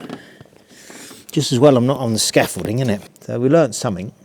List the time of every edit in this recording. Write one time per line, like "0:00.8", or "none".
0:03.2